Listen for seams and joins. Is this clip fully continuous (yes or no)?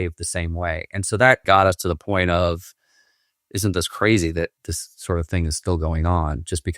no